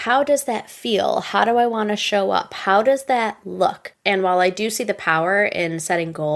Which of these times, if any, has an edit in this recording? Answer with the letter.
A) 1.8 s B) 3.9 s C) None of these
B